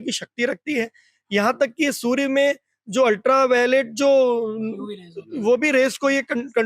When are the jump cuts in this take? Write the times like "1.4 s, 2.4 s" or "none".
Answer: none

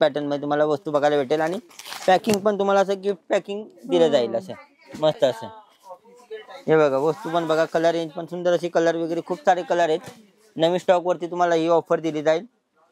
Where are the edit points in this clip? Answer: none

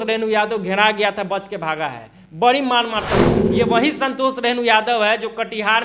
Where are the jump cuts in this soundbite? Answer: 3.4 s

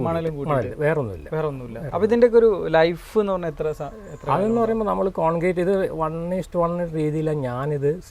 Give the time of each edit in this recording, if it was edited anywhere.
none

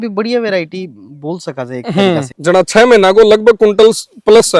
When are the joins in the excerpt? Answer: 2.3 s

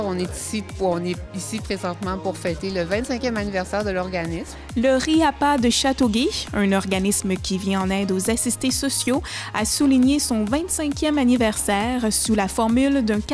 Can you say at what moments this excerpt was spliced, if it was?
4.6 s

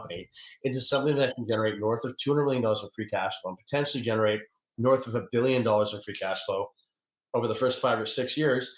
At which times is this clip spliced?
none

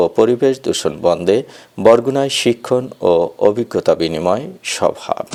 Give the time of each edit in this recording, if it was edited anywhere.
none

